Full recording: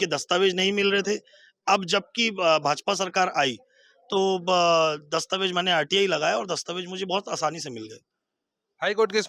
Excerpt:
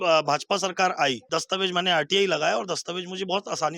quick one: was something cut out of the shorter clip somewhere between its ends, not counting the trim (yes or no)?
yes